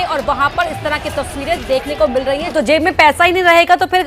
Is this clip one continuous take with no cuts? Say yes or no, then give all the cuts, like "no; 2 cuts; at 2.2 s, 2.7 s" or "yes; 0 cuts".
no; 1 cut; at 2.5 s